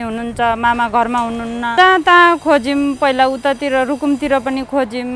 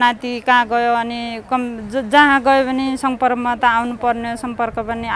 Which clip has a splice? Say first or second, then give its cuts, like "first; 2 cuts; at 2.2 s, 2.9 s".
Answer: first; 1 cut; at 1.7 s